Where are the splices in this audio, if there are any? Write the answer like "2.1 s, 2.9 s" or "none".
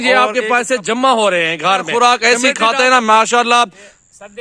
1.9 s